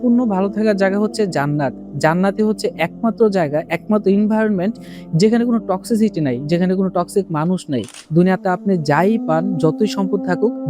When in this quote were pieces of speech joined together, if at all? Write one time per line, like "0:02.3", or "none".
0:08.0